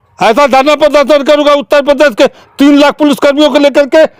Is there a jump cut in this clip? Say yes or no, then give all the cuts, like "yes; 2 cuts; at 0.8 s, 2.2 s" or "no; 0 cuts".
no; 0 cuts